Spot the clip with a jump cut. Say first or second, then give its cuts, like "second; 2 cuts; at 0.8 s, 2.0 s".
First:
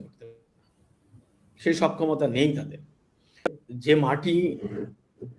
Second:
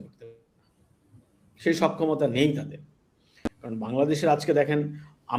first; 1 cut; at 3.6 s